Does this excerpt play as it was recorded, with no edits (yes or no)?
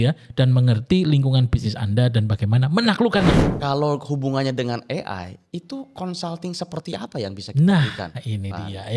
no